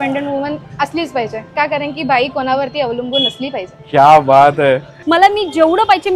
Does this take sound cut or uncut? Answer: cut